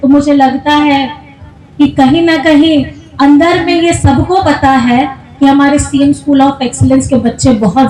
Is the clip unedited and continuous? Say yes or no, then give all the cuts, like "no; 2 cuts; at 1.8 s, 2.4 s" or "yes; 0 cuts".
yes; 0 cuts